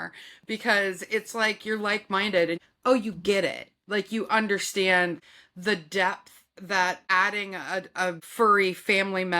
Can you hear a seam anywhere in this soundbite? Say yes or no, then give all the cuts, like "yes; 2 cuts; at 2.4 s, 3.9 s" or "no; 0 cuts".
yes; 2 cuts; at 2.6 s, 7.0 s